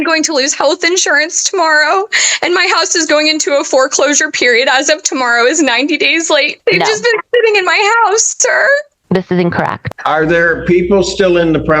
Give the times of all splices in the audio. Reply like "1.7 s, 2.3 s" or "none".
6.5 s, 9.8 s

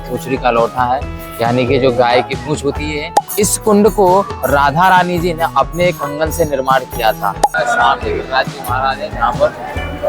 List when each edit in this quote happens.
3.2 s, 7.6 s

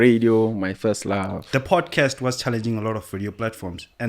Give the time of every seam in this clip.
1.4 s

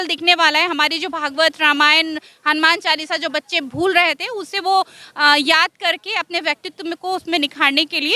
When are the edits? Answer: none

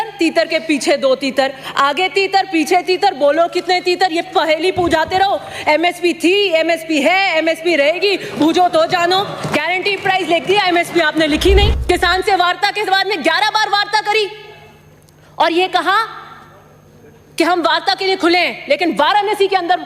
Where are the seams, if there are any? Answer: 11.8 s

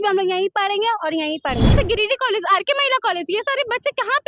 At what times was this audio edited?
1.7 s

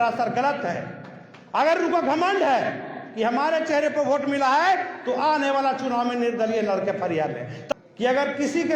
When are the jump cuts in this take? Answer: 7.6 s

